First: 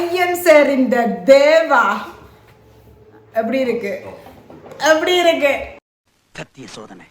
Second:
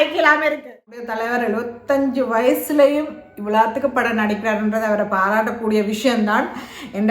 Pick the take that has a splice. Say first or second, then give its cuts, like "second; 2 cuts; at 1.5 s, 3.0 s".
second; 1 cut; at 1.1 s